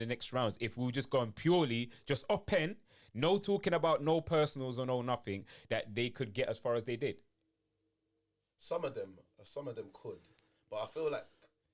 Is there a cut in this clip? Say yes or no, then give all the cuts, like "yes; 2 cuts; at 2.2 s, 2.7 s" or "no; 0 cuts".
no; 0 cuts